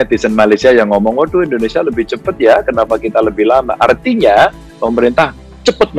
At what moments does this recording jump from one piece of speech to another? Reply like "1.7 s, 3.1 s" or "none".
none

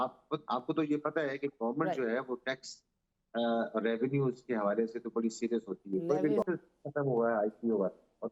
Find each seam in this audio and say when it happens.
6.4 s

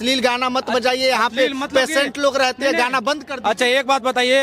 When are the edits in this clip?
none

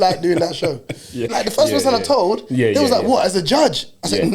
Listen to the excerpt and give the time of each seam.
1.3 s

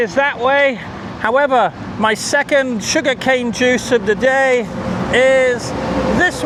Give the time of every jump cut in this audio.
none

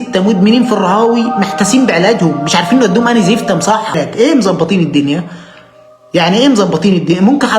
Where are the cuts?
4.0 s

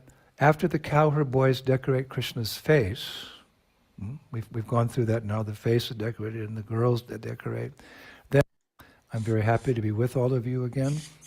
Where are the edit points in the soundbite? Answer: 8.4 s

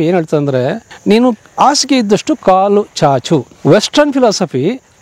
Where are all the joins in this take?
0.9 s, 3.5 s

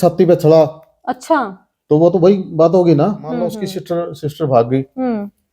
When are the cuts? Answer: 3.7 s

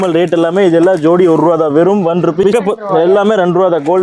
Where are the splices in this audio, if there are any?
2.5 s

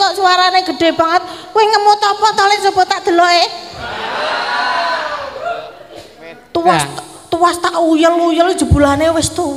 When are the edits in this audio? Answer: none

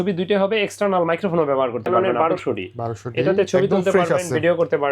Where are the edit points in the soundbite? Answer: 1.9 s

